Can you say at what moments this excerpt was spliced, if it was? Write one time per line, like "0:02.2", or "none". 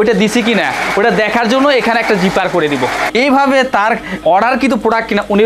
none